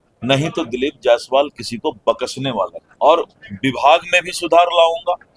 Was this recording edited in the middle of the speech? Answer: no; 0 cuts

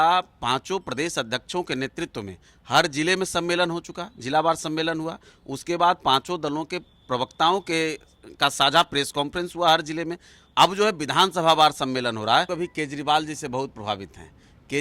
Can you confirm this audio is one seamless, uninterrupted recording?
no; 1 cut; at 12.5 s

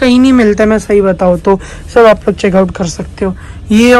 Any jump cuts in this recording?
no; 0 cuts

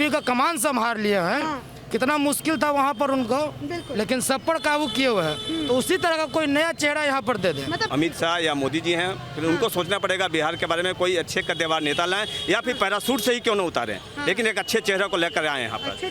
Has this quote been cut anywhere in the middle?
yes; 1 cut; at 7.8 s

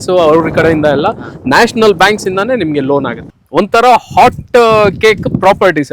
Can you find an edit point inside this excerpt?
yes; 1 cut; at 3.2 s

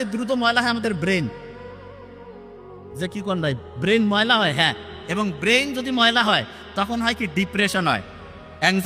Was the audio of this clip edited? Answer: no; 0 cuts

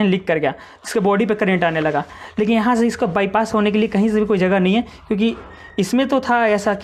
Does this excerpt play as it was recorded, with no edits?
yes; 0 cuts

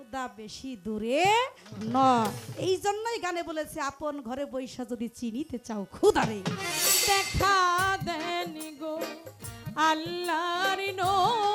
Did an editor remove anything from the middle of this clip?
yes; 1 cut; at 6.7 s

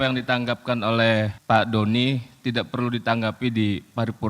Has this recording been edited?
yes; 1 cut; at 1.4 s

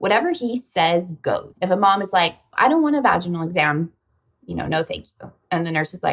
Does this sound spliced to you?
yes; 2 cuts; at 1.5 s, 2.4 s

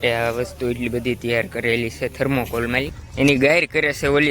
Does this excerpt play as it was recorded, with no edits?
no; 1 cut; at 3.0 s

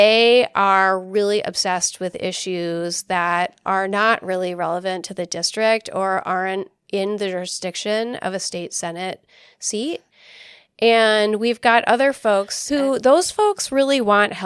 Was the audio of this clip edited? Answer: yes; 1 cut; at 12.6 s

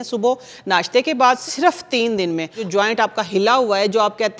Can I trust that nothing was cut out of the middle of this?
no; 2 cuts; at 1.4 s, 2.6 s

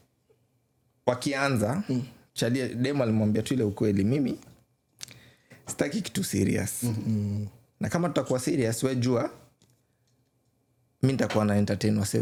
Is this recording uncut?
yes; 0 cuts

